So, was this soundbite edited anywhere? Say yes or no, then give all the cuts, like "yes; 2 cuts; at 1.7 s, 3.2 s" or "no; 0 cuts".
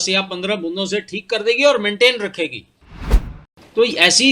yes; 1 cut; at 3.2 s